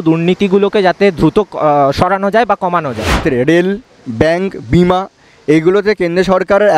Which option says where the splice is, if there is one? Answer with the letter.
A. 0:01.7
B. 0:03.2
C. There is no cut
B